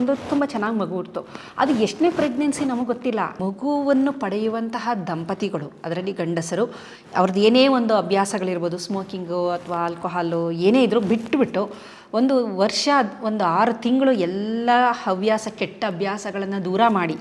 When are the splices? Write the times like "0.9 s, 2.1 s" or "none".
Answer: 3.3 s